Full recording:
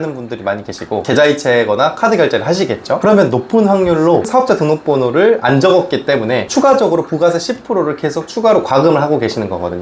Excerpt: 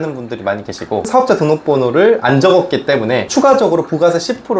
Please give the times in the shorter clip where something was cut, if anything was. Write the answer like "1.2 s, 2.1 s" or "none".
1.1 s